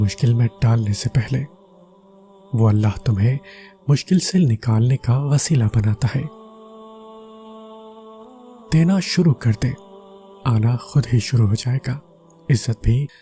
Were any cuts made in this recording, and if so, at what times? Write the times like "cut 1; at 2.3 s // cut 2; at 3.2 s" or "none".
none